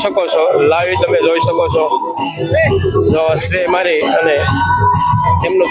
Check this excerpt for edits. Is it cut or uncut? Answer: uncut